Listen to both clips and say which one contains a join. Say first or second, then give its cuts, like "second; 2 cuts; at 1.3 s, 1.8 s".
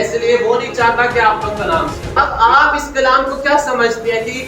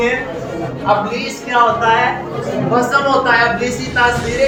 first; 1 cut; at 2.0 s